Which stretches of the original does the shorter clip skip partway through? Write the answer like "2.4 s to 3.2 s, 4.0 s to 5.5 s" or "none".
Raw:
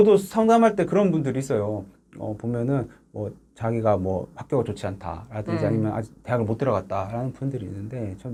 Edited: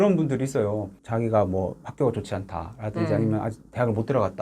1.9 s to 3.5 s

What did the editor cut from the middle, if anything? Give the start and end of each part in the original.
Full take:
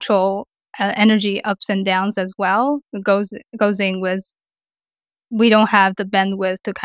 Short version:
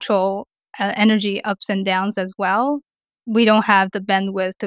2.9 s to 5.0 s

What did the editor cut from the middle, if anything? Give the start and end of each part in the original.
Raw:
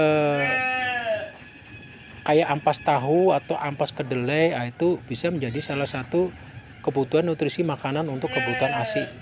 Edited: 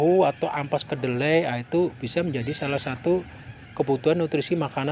none

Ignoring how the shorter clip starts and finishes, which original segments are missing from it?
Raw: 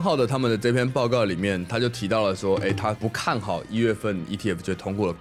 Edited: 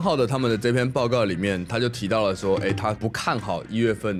none

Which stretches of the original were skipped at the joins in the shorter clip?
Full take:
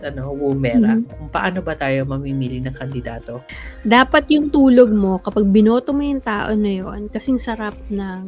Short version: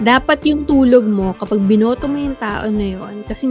none

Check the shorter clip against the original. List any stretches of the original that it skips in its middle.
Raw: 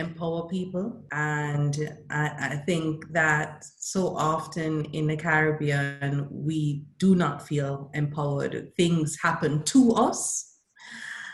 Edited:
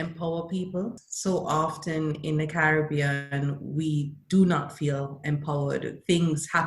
1.0 s to 3.7 s

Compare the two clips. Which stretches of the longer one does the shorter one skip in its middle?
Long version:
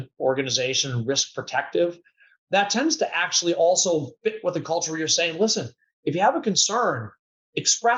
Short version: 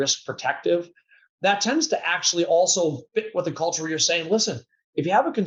none

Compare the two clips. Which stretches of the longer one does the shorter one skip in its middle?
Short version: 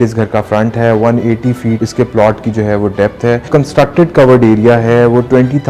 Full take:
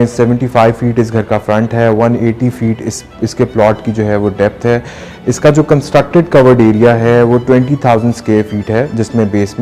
2.8 s to 3.2 s, 4.9 s to 5.7 s

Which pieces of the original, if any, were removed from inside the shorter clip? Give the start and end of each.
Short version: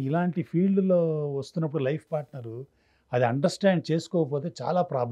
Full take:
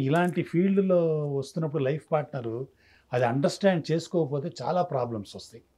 none

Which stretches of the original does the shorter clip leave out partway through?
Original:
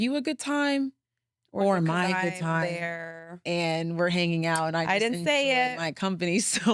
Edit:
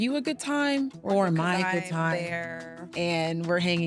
1.0 s to 1.5 s

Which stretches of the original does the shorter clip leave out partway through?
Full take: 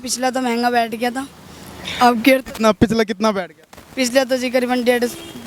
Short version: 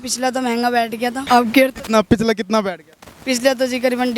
1.2 s to 1.9 s

